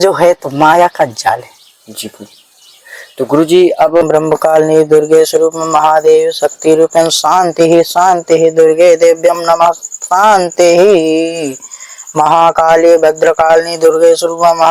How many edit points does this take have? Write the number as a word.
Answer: one